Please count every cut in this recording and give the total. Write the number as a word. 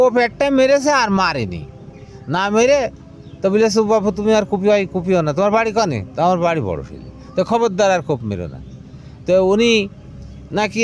zero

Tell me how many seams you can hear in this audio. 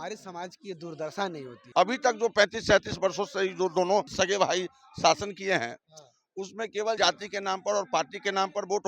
three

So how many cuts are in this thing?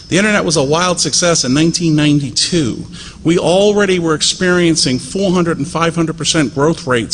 one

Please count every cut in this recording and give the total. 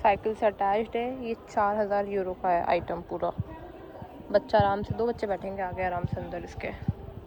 zero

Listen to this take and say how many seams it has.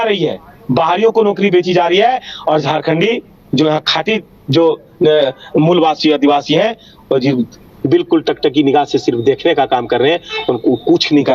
zero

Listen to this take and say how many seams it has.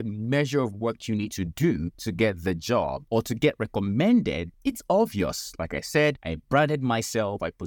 four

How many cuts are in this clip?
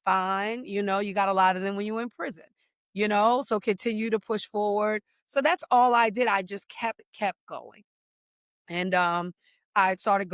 zero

